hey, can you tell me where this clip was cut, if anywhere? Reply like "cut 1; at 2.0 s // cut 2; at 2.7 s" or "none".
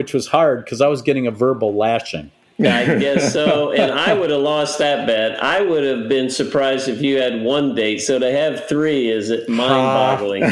none